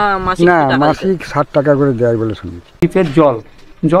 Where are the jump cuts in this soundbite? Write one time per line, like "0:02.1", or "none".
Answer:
0:02.8